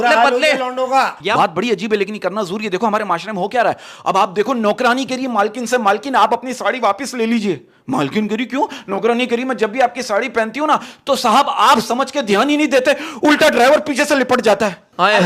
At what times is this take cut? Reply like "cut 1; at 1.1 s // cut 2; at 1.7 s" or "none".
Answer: cut 1; at 1.2 s